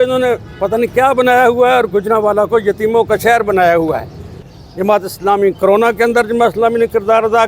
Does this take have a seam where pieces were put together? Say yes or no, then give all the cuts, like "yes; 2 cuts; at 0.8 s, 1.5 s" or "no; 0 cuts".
yes; 1 cut; at 4.5 s